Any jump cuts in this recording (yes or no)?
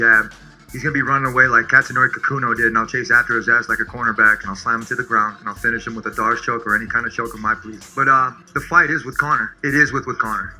yes